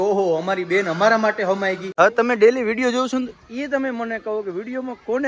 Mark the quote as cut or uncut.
cut